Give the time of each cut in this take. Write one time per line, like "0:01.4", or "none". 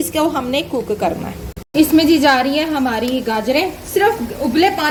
none